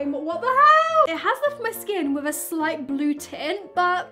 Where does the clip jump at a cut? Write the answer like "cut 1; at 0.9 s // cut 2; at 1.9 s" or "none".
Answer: cut 1; at 1.1 s